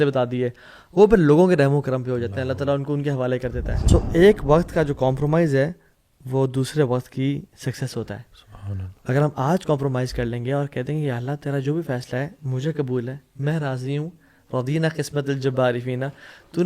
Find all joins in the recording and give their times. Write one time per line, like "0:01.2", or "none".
0:03.7